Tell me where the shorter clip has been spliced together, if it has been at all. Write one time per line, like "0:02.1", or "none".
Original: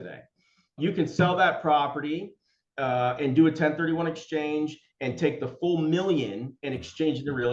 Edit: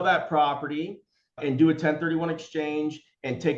0:01.4